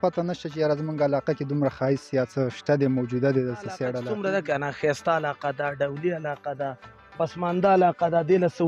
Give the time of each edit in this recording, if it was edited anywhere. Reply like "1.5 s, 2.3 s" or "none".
3.9 s